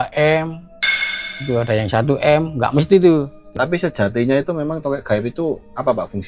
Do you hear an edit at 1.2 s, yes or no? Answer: no